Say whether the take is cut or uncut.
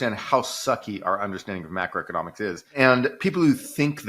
cut